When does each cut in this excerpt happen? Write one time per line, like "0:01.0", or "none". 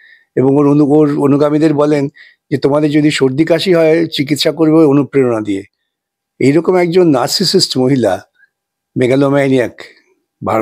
none